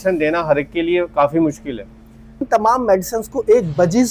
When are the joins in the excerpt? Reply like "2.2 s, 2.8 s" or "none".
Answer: 2.5 s